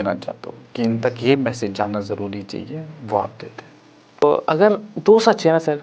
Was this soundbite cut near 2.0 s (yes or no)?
no